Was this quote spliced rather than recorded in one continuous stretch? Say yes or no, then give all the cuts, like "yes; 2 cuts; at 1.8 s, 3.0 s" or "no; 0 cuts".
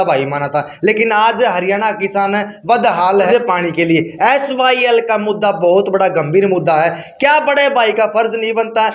yes; 1 cut; at 3.3 s